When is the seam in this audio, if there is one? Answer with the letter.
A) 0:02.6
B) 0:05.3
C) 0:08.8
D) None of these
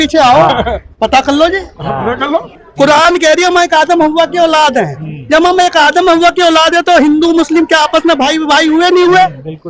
A